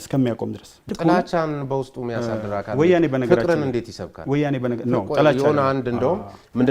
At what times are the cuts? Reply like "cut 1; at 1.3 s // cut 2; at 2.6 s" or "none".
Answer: cut 1; at 0.9 s